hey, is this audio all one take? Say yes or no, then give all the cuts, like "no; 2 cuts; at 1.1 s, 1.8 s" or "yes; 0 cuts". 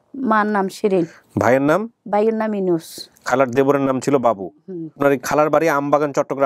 no; 1 cut; at 5.0 s